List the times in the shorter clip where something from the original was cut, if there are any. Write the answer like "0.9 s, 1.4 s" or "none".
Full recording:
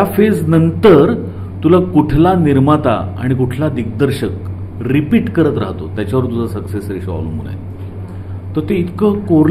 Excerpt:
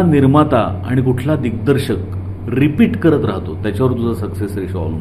none